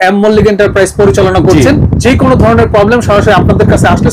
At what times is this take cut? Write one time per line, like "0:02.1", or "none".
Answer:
none

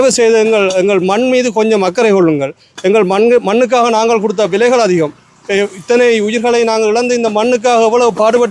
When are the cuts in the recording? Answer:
none

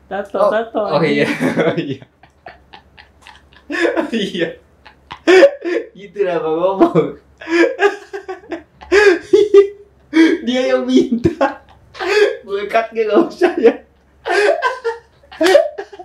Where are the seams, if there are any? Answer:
none

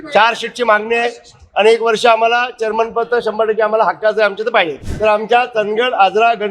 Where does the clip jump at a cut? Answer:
0:04.8

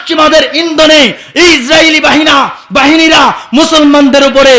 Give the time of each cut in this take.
none

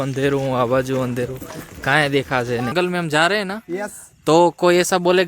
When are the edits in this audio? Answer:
0:02.7

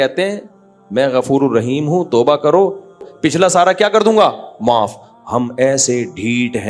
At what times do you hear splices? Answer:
0:03.1

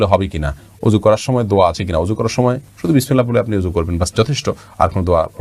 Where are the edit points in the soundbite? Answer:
none

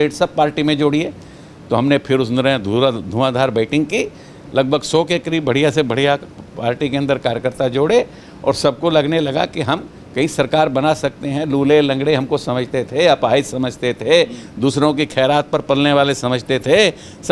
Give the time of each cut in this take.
none

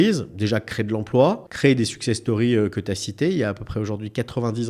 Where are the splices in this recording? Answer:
0:01.5

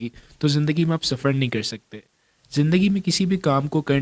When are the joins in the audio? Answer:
none

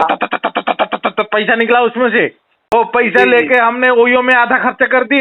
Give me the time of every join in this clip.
0:02.7

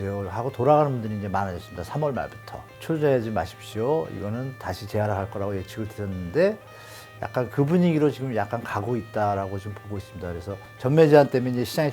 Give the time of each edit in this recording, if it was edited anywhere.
0:02.8
0:10.6

